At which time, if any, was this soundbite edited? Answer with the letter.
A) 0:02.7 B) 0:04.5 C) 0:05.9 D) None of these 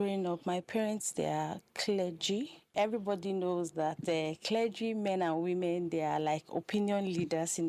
A